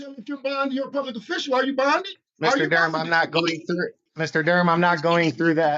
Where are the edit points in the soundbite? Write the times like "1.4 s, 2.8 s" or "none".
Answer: 2.2 s, 4.0 s